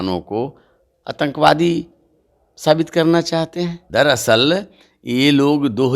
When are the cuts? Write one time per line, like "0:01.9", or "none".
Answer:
0:03.8